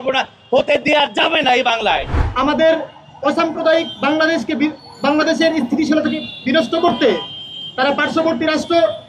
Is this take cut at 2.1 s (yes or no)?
yes